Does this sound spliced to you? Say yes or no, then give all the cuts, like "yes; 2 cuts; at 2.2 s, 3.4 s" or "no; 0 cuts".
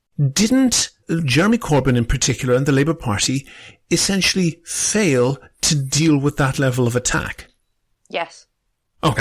yes; 1 cut; at 0.9 s